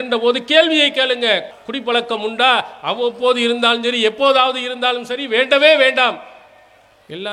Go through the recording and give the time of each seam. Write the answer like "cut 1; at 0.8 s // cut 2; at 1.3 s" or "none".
cut 1; at 1.5 s